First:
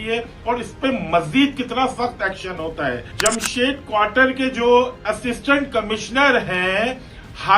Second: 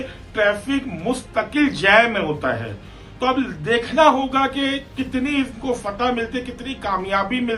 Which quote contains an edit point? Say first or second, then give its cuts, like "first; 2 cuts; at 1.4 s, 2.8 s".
first; 1 cut; at 3.1 s